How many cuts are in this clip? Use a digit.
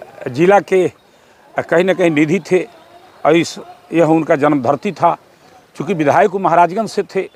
0